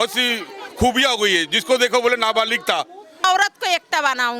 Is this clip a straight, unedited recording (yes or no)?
no